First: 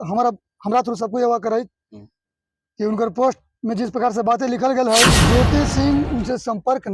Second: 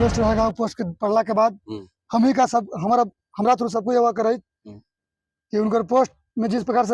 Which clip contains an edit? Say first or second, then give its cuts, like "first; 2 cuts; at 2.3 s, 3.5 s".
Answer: first; 1 cut; at 5.2 s